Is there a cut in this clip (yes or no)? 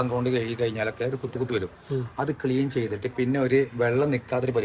no